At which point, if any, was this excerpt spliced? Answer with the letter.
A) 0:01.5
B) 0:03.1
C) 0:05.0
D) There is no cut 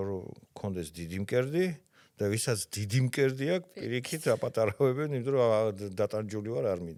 D